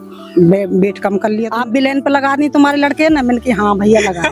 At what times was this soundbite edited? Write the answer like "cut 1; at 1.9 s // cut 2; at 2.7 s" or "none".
cut 1; at 1.5 s